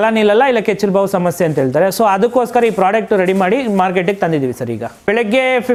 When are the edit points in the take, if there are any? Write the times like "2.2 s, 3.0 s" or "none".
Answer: none